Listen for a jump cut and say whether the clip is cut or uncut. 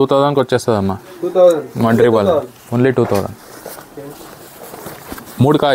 uncut